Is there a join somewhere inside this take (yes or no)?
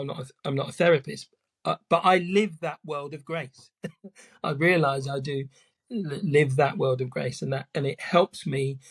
no